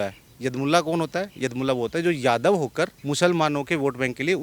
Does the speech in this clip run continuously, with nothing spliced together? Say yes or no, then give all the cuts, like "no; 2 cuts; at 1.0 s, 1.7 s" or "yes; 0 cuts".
no; 1 cut; at 3.0 s